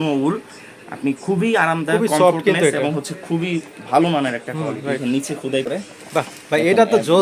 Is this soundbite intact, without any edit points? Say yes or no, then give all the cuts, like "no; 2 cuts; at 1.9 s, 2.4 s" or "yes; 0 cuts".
no; 1 cut; at 5.7 s